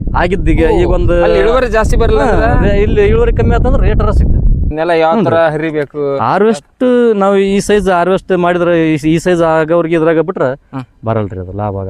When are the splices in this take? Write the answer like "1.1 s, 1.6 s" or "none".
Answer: 4.7 s